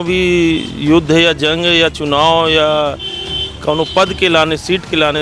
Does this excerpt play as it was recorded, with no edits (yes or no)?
yes